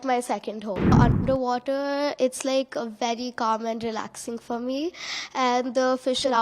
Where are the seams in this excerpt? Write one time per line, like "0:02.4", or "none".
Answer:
0:00.9